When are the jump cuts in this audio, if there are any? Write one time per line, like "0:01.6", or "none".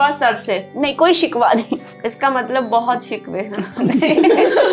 0:02.0